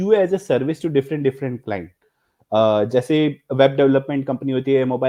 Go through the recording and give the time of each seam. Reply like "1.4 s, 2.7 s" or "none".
none